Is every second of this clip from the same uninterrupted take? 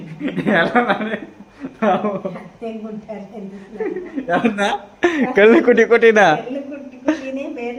yes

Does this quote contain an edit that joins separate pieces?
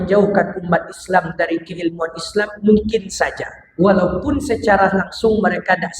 no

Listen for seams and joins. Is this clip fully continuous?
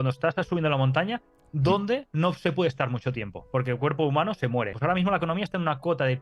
no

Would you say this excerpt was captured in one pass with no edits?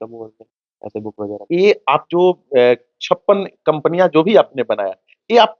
no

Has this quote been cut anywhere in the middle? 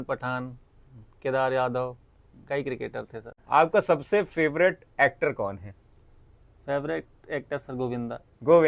yes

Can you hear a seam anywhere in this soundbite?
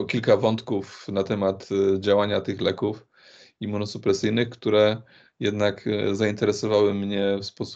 no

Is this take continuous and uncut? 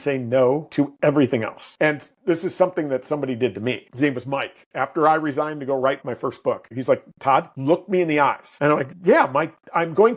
no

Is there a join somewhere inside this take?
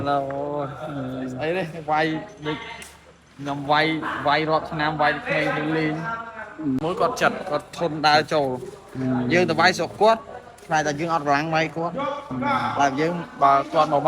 yes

